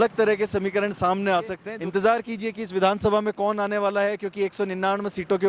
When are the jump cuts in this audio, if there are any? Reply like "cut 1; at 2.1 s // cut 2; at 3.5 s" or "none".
cut 1; at 1.7 s